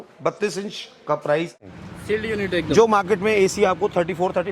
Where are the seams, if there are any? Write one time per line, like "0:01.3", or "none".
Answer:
0:01.6